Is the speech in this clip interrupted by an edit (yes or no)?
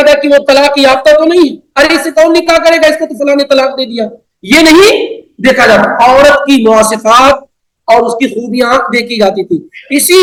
no